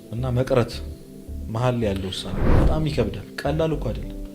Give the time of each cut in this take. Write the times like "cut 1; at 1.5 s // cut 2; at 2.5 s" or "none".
cut 1; at 2.7 s